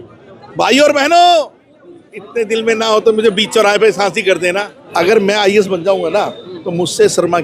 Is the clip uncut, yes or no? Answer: no